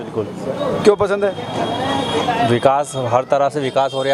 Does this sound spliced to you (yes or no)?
no